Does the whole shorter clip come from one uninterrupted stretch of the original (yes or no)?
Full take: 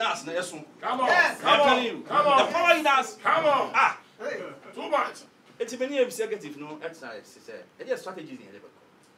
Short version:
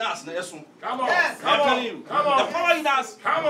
yes